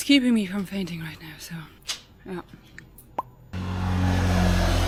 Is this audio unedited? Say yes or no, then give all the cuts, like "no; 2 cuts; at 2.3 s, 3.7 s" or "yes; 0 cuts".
yes; 0 cuts